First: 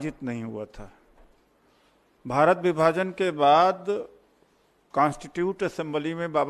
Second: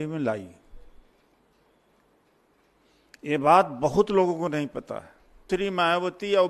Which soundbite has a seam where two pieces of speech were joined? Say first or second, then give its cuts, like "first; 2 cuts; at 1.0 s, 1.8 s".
second; 1 cut; at 5.5 s